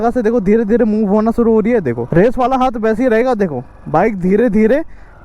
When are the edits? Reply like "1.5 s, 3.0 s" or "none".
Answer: 2.0 s

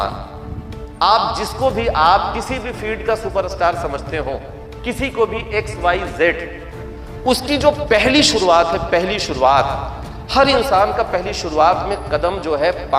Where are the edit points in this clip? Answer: none

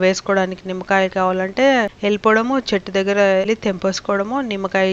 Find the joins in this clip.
1.9 s, 3.5 s

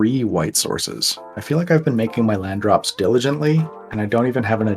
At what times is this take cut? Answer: 3.8 s

